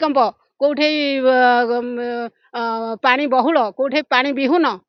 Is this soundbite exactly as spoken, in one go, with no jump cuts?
yes; 0 cuts

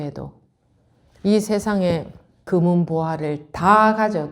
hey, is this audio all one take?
no; 1 cut; at 2.4 s

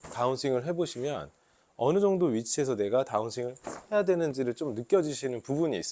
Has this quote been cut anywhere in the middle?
no; 0 cuts

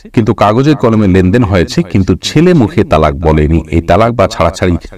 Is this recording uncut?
yes; 0 cuts

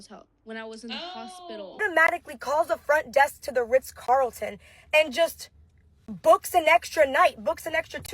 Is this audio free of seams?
no; 1 cut; at 1.8 s

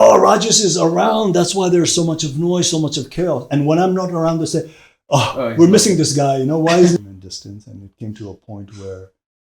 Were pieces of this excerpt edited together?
yes; 1 cut; at 7.0 s

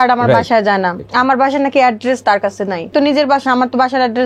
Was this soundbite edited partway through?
yes; 2 cuts; at 1.0 s, 2.9 s

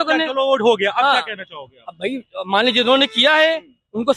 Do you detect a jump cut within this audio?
no; 0 cuts

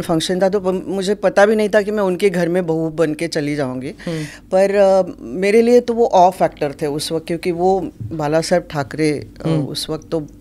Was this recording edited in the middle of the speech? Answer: no; 0 cuts

